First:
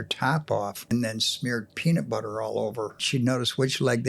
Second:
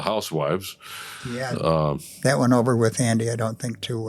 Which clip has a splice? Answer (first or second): first